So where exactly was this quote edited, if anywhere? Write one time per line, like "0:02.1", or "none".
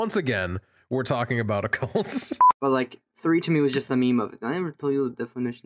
0:02.4